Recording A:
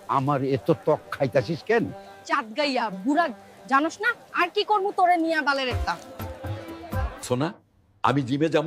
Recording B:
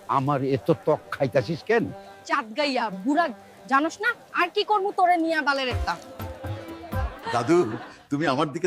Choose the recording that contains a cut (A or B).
A